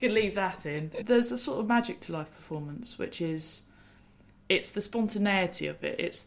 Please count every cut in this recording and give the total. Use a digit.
1